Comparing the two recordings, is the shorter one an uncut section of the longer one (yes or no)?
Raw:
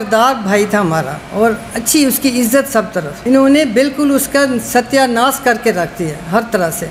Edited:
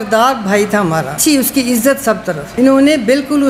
no